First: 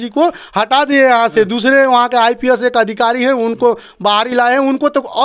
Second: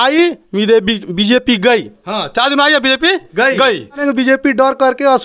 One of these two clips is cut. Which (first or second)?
second